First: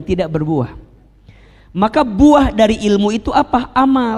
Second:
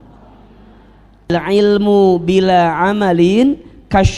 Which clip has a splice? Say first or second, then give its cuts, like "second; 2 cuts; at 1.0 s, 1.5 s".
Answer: second; 1 cut; at 1.3 s